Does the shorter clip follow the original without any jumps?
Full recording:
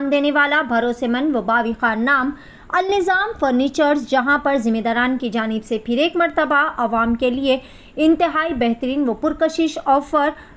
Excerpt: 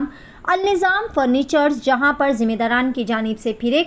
yes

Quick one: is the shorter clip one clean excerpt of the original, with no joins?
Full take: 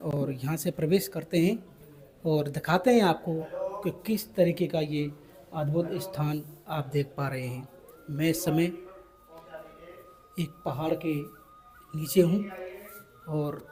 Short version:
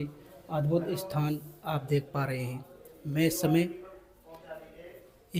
yes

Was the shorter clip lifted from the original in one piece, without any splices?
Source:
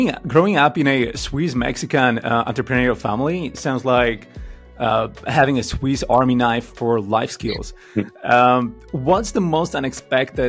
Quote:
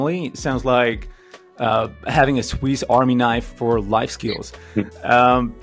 yes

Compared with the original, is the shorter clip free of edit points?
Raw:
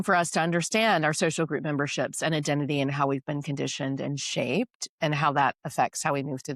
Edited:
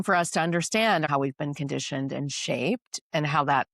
no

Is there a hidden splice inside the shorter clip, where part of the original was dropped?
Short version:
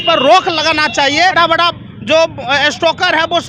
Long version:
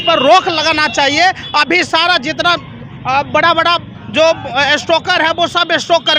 yes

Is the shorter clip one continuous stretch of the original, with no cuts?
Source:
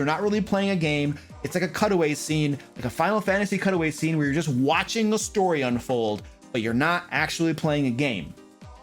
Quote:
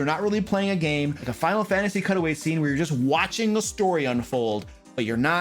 no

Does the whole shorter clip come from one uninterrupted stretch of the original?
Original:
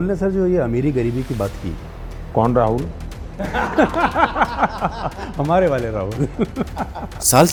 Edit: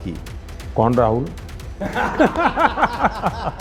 yes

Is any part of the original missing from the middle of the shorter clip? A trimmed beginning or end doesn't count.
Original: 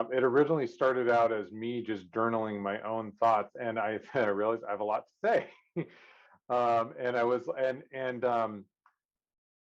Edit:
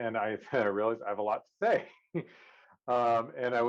no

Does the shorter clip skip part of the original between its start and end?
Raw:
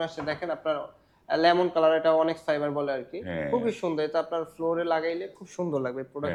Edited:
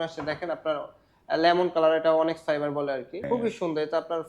yes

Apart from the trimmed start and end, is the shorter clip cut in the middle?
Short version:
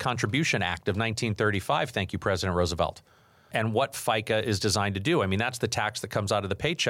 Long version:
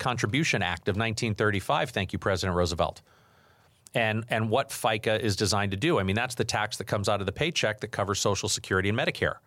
yes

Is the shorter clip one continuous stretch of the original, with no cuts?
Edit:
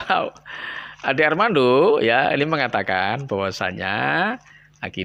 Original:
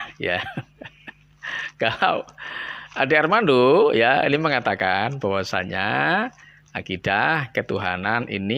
yes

